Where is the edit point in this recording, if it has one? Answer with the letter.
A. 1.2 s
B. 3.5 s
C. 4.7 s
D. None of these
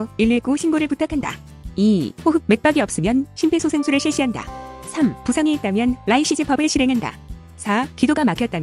A